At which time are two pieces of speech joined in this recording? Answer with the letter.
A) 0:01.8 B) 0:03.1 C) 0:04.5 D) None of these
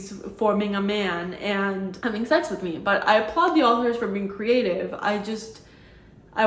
D